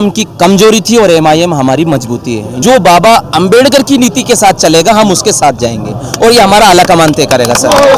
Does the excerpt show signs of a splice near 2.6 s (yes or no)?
yes